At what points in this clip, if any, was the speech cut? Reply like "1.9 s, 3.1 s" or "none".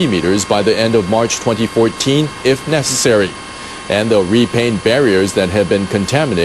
2.4 s